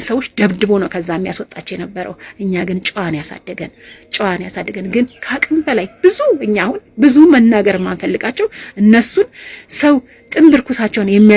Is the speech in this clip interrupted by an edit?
no; 0 cuts

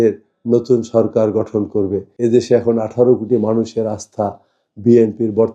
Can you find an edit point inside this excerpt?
yes; 1 cut; at 2.0 s

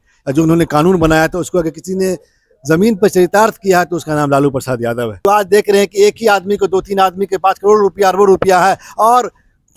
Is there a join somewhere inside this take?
yes; 1 cut; at 5.1 s

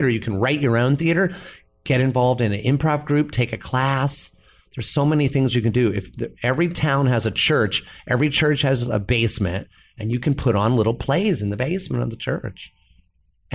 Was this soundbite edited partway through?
no; 0 cuts

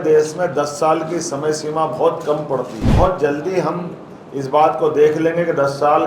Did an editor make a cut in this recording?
yes; 1 cut; at 2.9 s

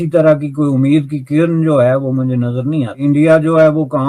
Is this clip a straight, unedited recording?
no; 1 cut; at 3.0 s

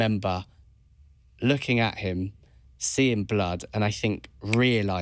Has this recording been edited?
no; 0 cuts

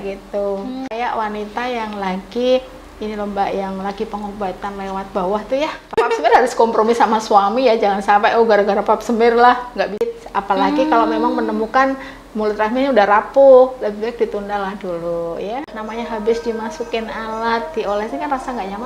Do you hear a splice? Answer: yes; 4 cuts; at 0.9 s, 5.9 s, 10.0 s, 15.7 s

